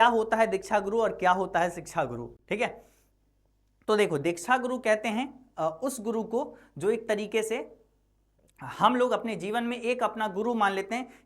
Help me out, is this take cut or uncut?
uncut